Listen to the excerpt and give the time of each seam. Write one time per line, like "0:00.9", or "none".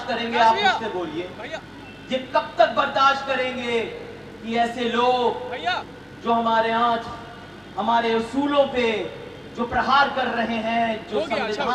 none